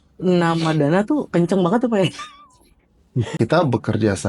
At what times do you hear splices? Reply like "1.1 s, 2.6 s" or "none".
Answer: 3.3 s